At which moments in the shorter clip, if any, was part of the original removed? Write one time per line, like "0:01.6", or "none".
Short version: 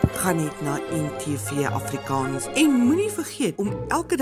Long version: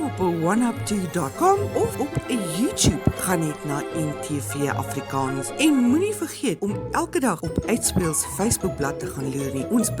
none

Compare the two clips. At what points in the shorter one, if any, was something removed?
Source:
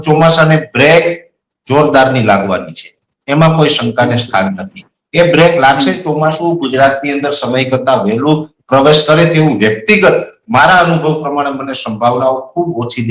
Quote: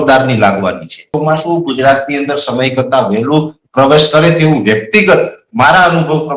0:01.1

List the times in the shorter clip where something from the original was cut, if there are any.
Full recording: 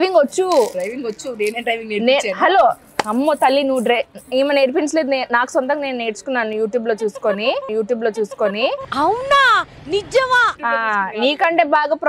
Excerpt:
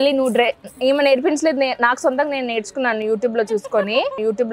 none

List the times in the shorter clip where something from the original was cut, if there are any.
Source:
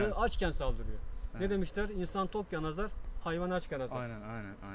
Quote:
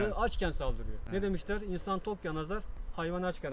0:00.9

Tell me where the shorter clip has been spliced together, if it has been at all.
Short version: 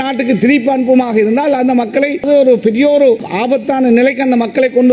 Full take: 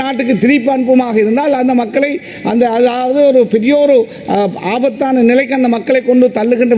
0:02.2
0:03.3

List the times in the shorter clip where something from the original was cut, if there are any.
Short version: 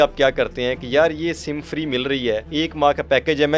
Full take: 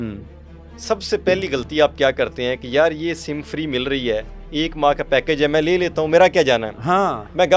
0:02.5

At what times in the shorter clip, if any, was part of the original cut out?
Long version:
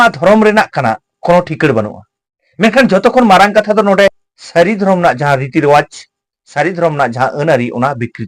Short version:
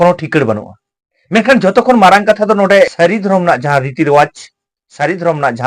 0:02.9

